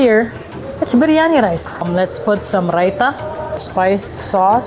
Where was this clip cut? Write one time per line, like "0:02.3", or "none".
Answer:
0:01.9
0:03.7